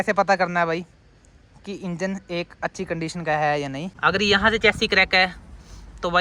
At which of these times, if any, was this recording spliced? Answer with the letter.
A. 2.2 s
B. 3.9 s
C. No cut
B